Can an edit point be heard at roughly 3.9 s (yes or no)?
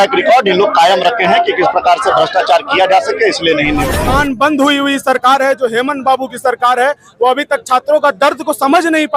yes